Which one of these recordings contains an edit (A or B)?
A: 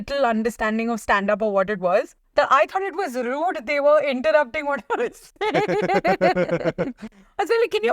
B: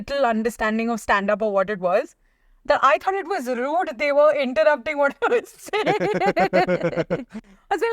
A